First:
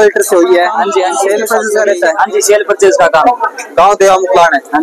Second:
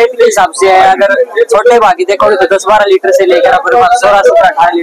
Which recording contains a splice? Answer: first; 1 cut; at 1.2 s

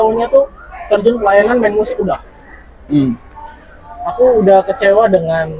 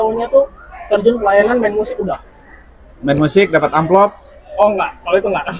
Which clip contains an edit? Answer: first; 1 cut; at 2.9 s

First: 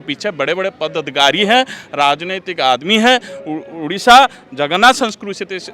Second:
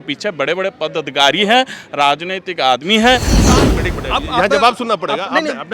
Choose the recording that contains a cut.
second; 1 cut; at 3.4 s

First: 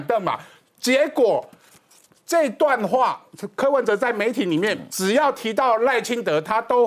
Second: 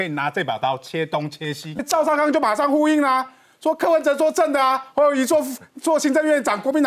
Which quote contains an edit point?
second; 1 cut; at 1.8 s

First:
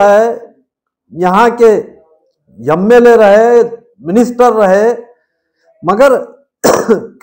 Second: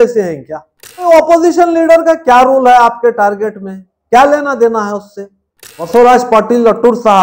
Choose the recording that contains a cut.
second; 2 cuts; at 1.0 s, 5.9 s

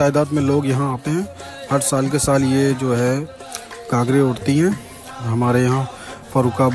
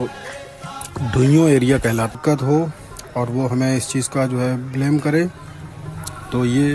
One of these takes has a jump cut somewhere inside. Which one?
second; 1 cut; at 2.1 s

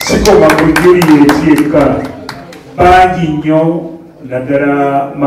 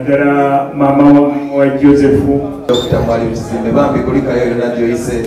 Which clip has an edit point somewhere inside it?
second; 1 cut; at 2.6 s

